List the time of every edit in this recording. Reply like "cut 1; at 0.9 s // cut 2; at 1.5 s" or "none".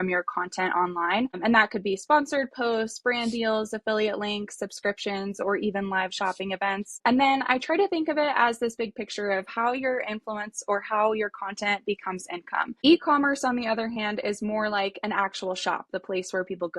cut 1; at 1.4 s // cut 2; at 6.9 s // cut 3; at 12.8 s